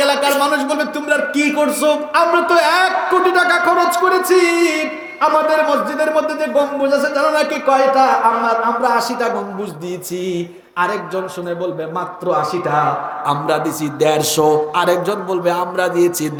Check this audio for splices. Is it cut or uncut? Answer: uncut